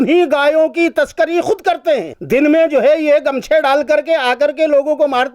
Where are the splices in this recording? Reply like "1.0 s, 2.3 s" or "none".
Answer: 2.1 s